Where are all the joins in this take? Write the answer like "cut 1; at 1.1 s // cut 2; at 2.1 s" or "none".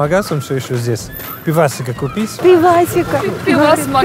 cut 1; at 2.3 s